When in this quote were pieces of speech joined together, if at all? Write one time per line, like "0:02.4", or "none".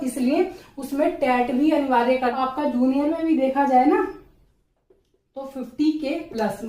0:02.3

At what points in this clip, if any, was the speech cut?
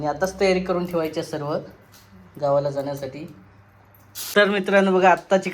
0:04.1

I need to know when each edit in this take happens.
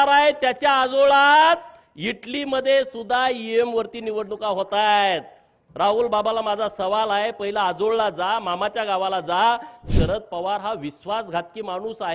0:09.8

